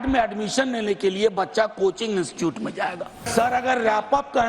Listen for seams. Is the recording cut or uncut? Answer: cut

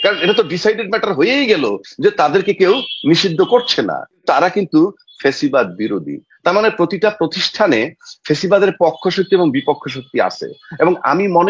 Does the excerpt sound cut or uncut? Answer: cut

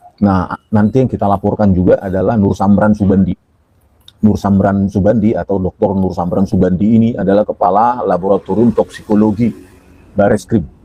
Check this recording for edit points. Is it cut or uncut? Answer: uncut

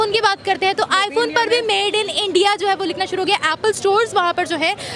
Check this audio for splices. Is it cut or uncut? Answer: uncut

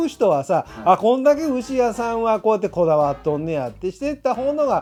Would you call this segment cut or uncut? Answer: uncut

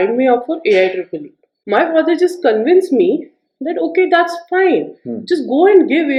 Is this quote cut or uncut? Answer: uncut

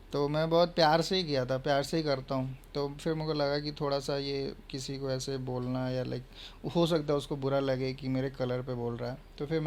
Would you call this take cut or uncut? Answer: uncut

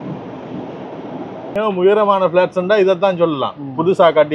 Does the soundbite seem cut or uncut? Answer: cut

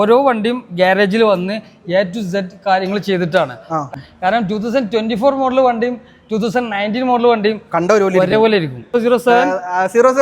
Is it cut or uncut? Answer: cut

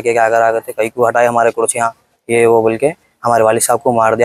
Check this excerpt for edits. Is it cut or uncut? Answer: uncut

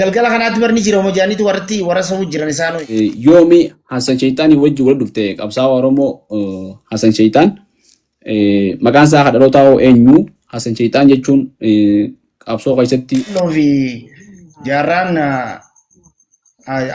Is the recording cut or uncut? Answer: cut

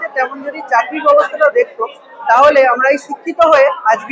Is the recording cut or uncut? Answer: uncut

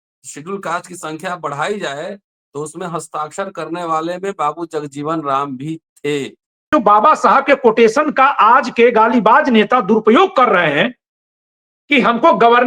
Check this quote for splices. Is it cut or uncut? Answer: cut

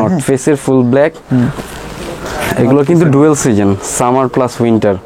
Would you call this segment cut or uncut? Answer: uncut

